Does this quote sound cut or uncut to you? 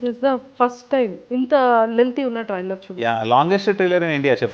cut